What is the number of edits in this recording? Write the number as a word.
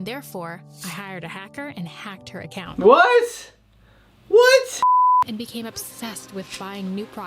one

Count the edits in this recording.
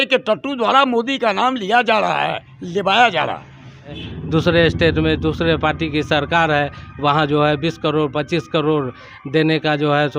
one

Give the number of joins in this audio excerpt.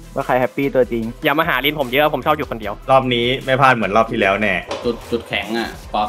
two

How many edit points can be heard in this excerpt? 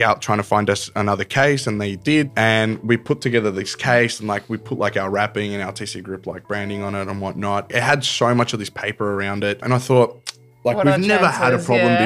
three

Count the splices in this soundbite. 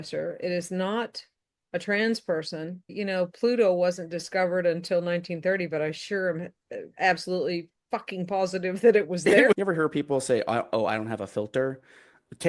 two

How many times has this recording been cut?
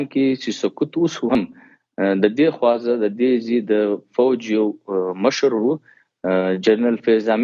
one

